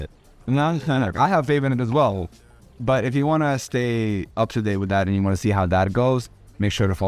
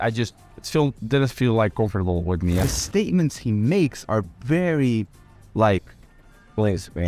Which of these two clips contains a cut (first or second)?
second